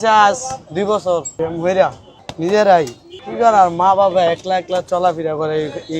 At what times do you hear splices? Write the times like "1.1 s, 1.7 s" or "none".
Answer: 1.3 s, 2.1 s